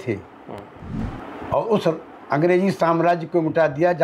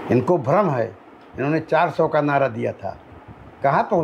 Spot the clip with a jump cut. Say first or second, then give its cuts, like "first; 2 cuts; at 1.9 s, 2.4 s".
first; 1 cut; at 1.0 s